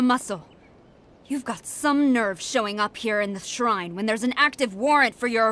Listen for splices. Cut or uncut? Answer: uncut